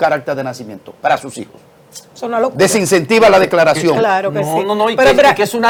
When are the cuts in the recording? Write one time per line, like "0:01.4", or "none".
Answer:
none

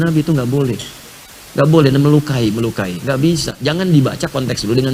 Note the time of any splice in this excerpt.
none

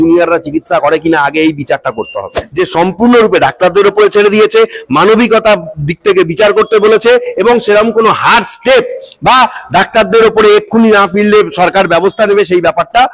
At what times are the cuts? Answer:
0:02.4

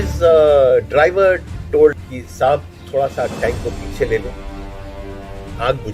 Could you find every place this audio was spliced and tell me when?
0:02.0

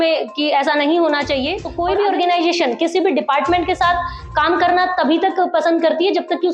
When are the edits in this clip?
0:01.6

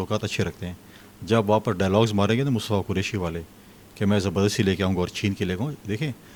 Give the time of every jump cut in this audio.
none

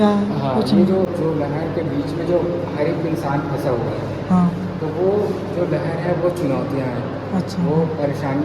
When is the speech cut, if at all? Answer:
0:01.1

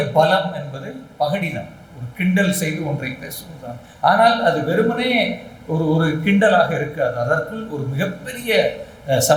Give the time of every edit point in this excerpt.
none

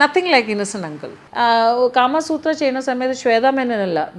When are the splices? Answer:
0:01.2

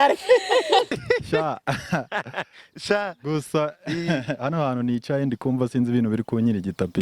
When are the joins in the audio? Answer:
0:01.0

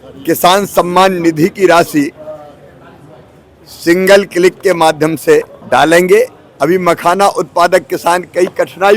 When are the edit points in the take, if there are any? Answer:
0:05.6
0:06.6

